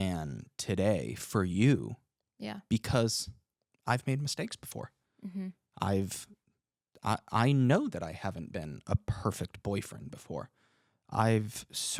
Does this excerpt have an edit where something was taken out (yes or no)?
no